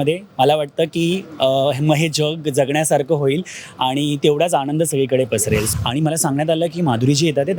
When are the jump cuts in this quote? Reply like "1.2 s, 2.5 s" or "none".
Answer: 5.7 s